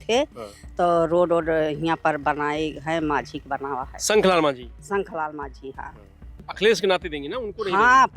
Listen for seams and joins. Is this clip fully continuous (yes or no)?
no